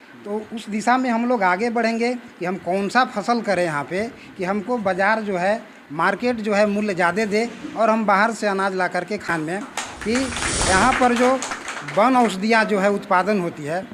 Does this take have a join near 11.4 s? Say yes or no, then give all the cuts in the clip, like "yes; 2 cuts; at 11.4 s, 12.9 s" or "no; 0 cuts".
no; 1 cut; at 9.3 s